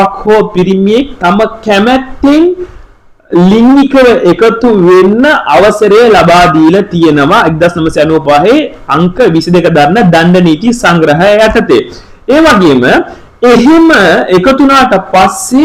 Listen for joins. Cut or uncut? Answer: uncut